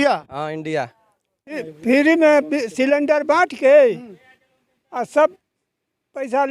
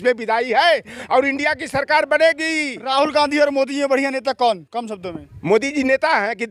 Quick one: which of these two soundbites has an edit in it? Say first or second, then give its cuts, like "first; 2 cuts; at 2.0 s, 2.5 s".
first; 1 cut; at 1.7 s